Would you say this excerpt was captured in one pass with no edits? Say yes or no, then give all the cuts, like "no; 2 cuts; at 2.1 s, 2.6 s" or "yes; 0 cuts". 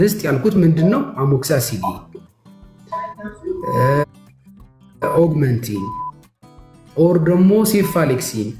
yes; 0 cuts